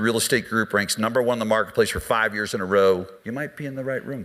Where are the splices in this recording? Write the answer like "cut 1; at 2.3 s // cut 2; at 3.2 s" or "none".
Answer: cut 1; at 3.2 s

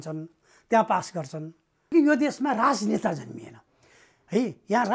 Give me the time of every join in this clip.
cut 1; at 1.9 s

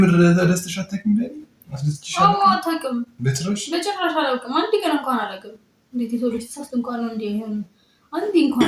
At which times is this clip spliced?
none

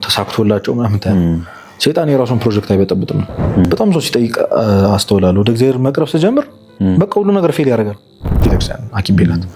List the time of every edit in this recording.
cut 1; at 3.6 s // cut 2; at 8.5 s

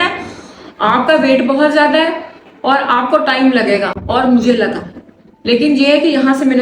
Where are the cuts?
none

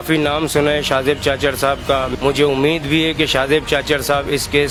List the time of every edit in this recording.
none

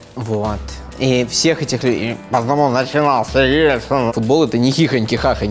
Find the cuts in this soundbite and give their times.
cut 1; at 4.1 s

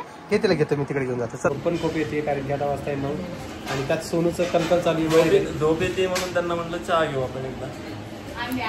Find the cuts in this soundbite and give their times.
cut 1; at 1.5 s

